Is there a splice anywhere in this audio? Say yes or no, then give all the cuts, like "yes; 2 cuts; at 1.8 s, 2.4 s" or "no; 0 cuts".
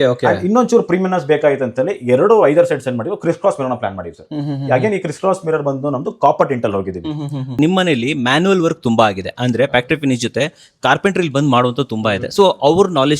yes; 1 cut; at 7.5 s